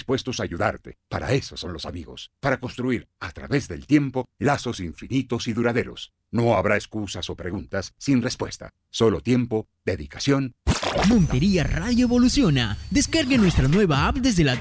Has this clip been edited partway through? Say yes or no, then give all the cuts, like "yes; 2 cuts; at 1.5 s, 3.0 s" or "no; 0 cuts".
yes; 1 cut; at 10.6 s